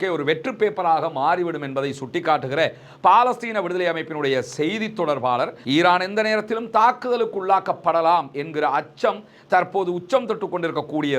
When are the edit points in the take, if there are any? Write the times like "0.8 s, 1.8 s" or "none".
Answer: 5.6 s